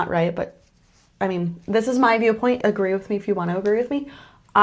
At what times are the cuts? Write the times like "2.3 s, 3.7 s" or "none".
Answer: 2.6 s